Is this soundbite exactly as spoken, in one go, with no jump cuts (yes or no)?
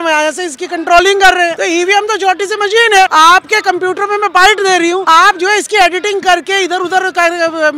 no